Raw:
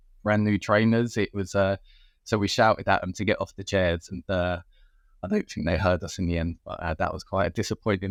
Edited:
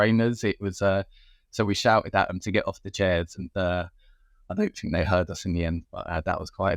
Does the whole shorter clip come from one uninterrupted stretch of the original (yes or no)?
yes